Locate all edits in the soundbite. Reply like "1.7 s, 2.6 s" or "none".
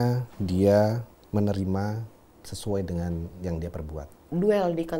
1.1 s, 4.2 s